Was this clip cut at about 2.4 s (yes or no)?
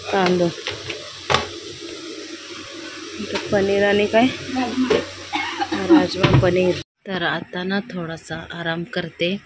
no